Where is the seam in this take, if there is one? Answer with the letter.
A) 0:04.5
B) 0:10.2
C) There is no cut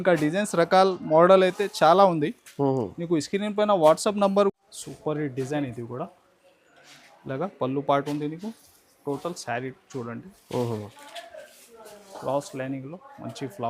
A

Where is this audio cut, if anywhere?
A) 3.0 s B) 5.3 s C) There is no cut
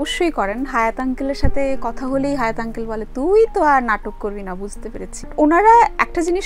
B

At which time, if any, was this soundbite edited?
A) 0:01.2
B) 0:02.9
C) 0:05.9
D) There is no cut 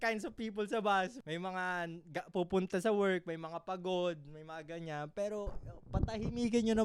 A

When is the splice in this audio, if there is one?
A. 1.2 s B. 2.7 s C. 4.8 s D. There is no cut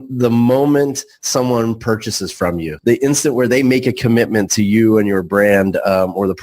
B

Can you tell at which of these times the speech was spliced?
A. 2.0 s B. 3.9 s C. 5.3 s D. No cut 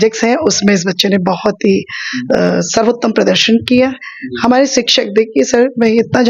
D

